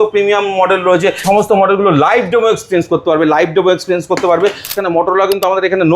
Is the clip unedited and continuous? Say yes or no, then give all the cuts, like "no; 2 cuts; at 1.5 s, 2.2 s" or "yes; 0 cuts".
no; 2 cuts; at 1.2 s, 4.7 s